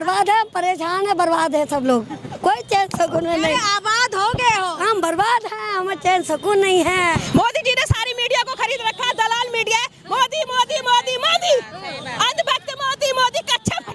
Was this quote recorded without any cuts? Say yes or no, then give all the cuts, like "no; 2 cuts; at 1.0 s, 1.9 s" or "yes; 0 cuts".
no; 1 cut; at 7.2 s